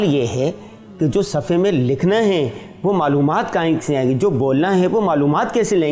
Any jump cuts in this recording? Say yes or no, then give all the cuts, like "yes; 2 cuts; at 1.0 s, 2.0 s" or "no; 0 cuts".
no; 0 cuts